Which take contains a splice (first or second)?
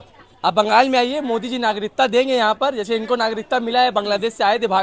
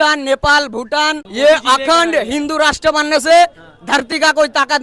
second